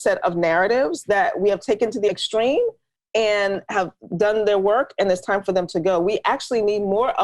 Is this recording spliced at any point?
yes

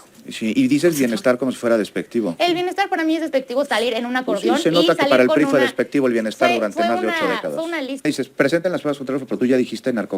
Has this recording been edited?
yes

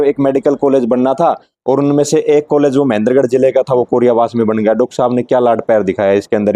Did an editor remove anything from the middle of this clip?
no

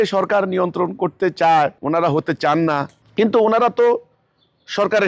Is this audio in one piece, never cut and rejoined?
no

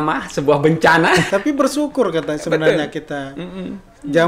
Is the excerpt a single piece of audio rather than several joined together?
no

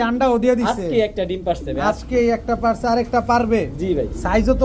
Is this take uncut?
yes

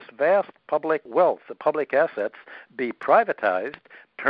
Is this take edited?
no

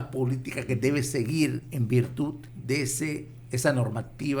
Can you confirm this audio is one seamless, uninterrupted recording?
no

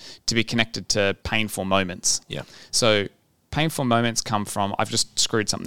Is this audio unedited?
no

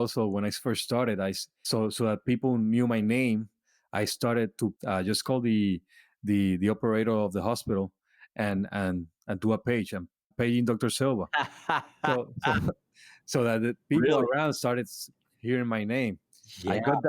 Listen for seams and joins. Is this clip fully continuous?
no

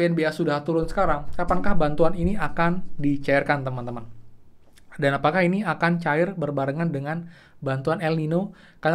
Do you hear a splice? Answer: no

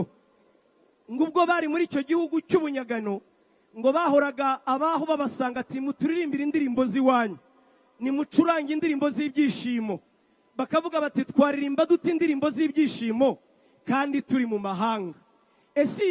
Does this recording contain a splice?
no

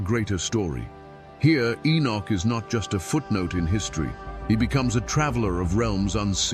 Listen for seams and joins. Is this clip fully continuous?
yes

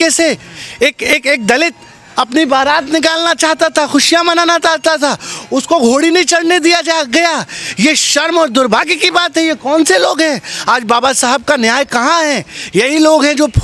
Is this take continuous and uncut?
yes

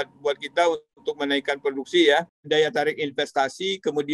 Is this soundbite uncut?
no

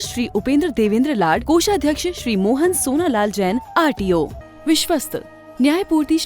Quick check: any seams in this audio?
yes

